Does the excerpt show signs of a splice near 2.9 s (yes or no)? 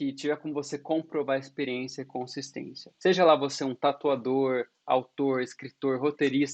yes